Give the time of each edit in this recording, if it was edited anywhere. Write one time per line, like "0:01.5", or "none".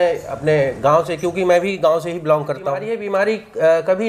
0:02.9